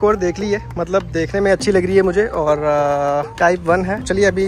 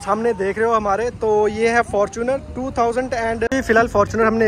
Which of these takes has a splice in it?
second; 1 cut; at 3.5 s

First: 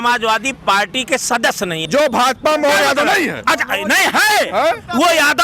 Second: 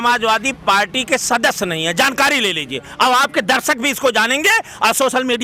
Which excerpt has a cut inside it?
first; 1 cut; at 1.8 s

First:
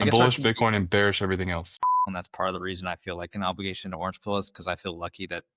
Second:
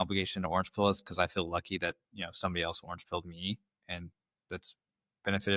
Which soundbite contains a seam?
first; 1 cut; at 1.9 s

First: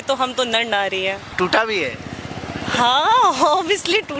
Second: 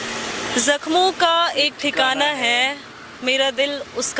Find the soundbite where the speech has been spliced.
first; 1 cut; at 1.3 s

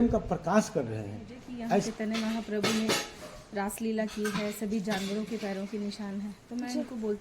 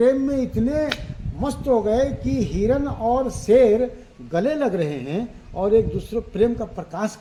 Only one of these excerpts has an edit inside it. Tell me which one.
first; 1 cut; at 1.9 s

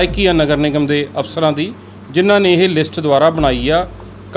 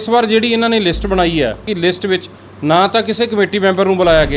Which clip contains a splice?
second; 1 cut; at 1.7 s

